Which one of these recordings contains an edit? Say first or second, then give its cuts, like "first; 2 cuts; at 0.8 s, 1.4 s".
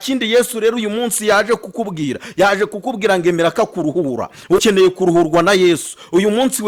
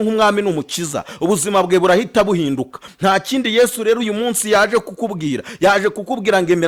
first; 1 cut; at 4.6 s